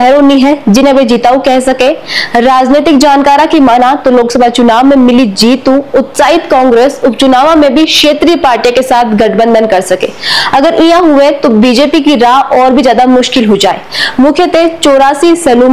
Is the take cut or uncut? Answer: uncut